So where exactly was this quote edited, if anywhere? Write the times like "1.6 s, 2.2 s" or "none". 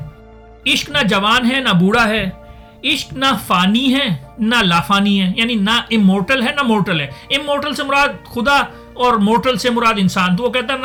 none